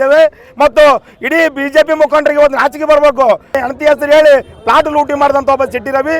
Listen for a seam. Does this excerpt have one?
no; 0 cuts

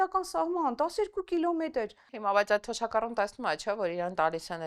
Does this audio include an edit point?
yes; 1 cut; at 2.1 s

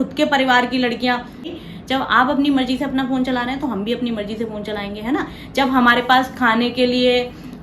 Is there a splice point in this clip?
yes; 1 cut; at 1.4 s

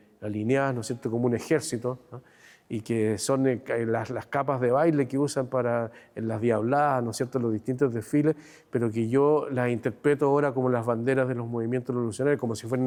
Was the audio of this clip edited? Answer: no; 0 cuts

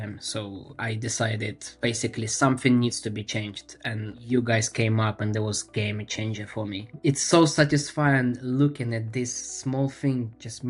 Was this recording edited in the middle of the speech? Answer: yes; 3 cuts; at 1.6 s, 4.2 s, 6.9 s

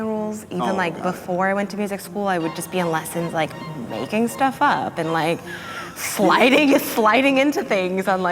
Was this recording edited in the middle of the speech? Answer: no; 0 cuts

